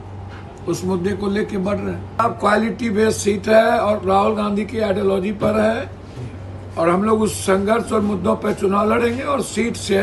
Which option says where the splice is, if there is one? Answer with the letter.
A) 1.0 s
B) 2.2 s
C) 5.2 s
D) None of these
B